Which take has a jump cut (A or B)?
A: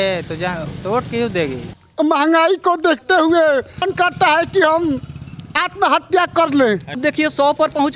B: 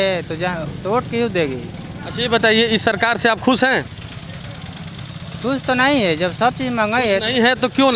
A